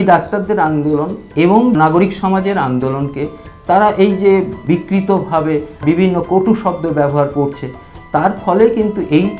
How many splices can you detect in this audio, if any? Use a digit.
1